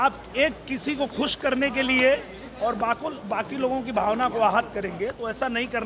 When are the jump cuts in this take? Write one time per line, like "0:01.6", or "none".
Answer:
none